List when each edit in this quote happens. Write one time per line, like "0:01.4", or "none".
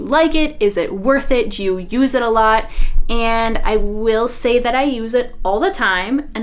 none